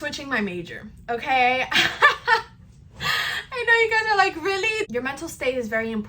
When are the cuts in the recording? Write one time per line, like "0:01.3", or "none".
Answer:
0:04.9